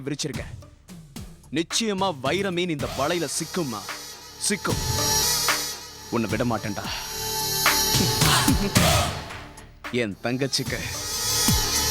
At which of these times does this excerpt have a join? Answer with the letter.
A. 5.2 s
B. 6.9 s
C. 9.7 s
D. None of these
A